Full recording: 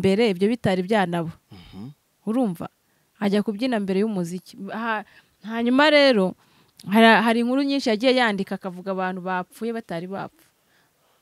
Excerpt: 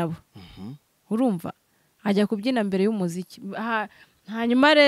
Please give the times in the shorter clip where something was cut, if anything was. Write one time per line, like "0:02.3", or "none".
none